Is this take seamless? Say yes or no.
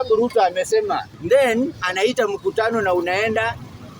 no